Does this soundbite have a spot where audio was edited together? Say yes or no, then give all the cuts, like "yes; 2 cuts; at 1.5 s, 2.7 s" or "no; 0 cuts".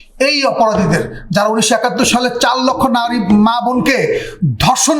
no; 0 cuts